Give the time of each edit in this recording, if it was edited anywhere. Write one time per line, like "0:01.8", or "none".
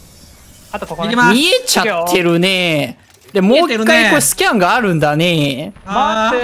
none